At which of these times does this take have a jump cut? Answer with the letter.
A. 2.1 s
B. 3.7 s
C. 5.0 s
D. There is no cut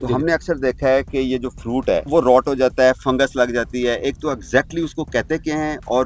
A